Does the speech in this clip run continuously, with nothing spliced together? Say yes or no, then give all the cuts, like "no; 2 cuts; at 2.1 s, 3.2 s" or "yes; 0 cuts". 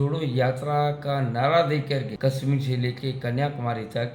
no; 1 cut; at 2.1 s